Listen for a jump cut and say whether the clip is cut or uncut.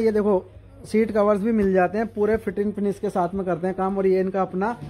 uncut